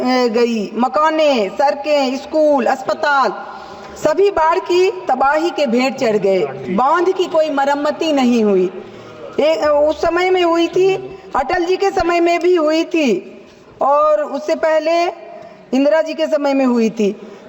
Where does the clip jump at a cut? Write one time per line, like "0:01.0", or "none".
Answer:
0:06.6